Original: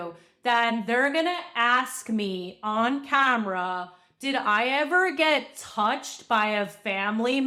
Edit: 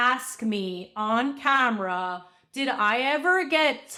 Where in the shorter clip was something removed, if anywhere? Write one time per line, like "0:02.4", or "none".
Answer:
none